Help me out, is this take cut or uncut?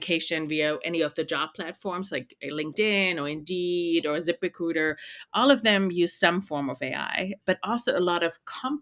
uncut